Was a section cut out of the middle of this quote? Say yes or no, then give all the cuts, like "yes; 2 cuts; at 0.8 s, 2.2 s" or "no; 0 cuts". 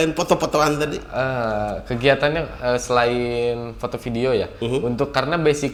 no; 0 cuts